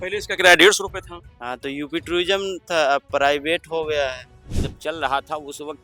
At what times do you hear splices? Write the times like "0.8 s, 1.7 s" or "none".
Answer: 4.6 s